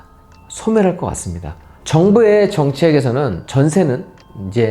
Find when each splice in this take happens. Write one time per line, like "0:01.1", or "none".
0:01.7
0:03.4